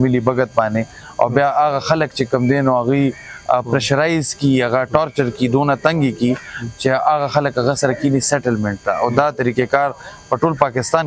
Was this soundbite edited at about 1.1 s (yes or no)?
no